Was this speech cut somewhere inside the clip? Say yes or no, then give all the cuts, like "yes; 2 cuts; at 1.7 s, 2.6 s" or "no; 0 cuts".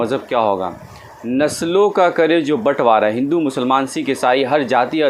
no; 0 cuts